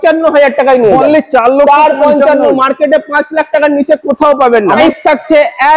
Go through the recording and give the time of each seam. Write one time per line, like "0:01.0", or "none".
0:04.8